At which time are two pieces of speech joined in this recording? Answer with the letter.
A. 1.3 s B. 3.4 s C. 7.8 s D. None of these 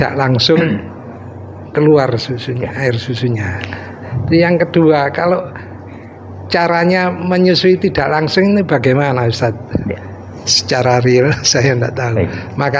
D